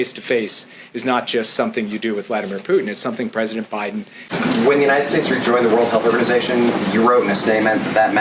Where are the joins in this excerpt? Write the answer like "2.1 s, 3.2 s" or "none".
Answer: 4.2 s